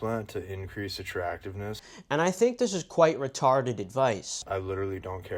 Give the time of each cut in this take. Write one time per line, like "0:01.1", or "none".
0:01.9
0:04.3

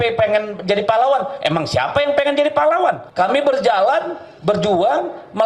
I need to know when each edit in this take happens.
0:03.0

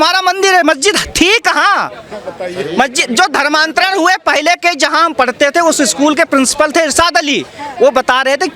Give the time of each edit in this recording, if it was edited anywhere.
none

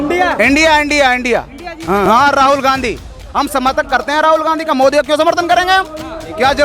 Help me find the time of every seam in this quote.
0:02.0

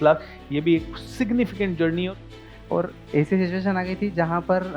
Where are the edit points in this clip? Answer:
0:02.2

